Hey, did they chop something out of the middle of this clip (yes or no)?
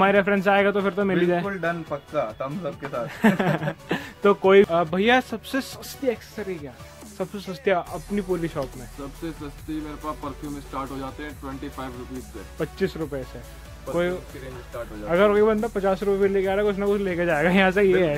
yes